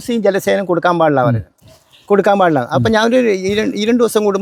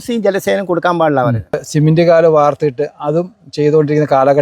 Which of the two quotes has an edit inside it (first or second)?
second